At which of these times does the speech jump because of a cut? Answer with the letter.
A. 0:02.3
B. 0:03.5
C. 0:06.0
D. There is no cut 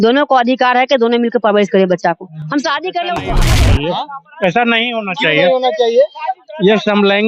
B